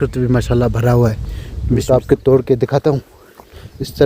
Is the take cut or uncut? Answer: cut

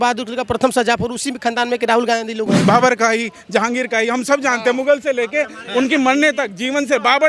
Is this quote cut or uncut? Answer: cut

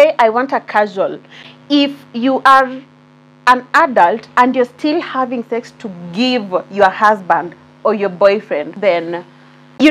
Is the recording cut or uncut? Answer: cut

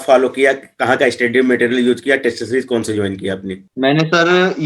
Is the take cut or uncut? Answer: uncut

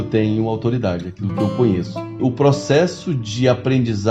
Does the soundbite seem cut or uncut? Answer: cut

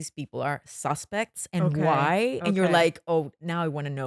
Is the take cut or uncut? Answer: uncut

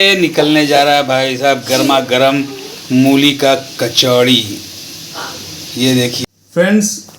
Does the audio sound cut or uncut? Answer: cut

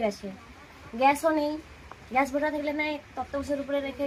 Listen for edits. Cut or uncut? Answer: uncut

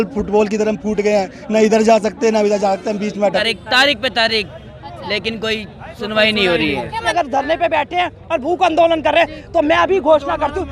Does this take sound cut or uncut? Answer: cut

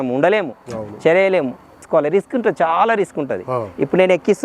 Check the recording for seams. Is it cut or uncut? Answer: cut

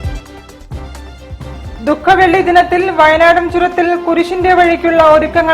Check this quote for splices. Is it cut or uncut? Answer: uncut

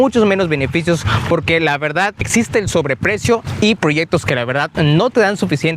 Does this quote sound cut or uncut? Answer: cut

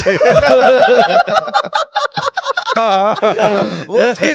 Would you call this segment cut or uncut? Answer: uncut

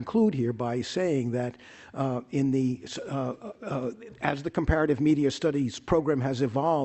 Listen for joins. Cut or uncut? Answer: cut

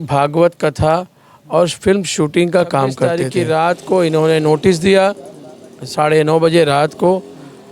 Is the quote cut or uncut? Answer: cut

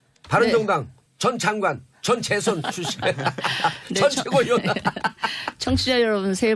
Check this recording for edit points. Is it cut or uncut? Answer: uncut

